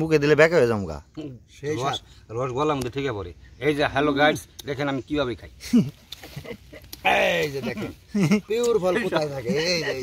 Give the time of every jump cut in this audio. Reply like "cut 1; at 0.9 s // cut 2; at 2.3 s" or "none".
none